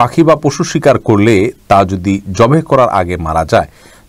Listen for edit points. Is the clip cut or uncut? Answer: uncut